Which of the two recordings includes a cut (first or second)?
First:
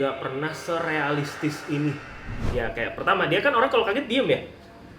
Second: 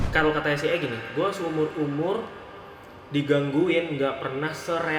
first